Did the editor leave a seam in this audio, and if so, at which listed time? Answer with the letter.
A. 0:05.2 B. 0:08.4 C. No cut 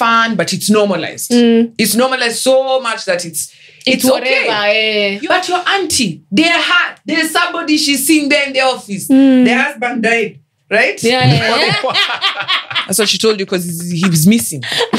A